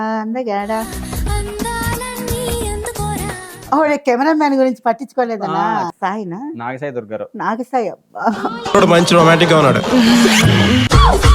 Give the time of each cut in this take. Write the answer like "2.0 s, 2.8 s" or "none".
3.5 s, 5.9 s